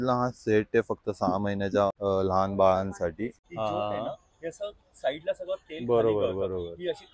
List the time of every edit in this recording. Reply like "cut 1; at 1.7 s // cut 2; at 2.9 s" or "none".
cut 1; at 2.0 s // cut 2; at 3.4 s